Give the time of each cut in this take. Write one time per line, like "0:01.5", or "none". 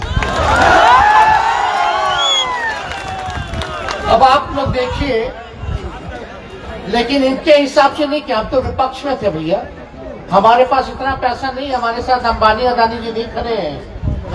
none